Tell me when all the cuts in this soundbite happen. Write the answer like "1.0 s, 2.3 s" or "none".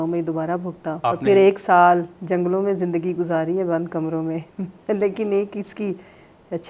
1.0 s